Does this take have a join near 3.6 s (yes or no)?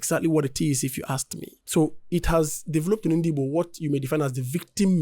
no